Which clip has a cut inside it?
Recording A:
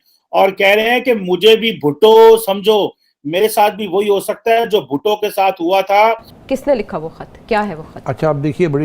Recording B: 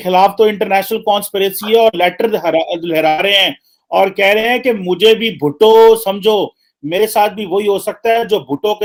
A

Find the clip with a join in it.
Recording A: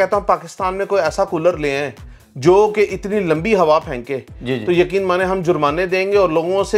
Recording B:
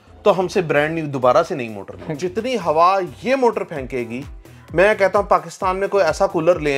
B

